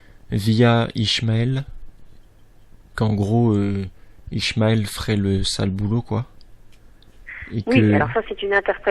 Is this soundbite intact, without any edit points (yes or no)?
yes